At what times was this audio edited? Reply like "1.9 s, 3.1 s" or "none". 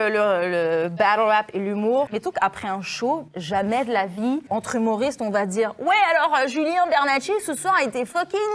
2.1 s, 4.4 s